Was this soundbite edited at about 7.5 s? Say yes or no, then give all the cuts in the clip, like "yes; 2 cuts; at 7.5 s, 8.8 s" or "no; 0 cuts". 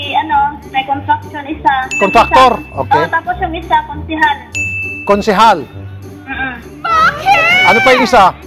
no; 0 cuts